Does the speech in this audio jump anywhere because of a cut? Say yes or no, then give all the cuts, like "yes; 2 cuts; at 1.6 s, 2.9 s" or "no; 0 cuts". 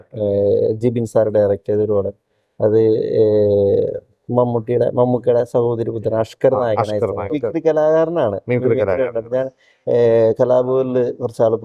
yes; 1 cut; at 7.3 s